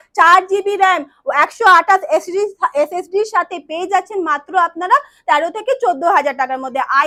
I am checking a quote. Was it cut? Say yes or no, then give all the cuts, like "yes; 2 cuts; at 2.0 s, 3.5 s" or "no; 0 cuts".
no; 0 cuts